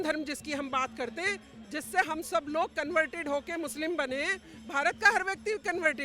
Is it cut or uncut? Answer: uncut